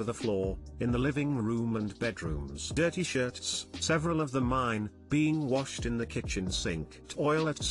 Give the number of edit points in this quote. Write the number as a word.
one